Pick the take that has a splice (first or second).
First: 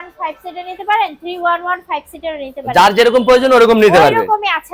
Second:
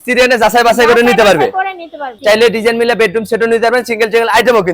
second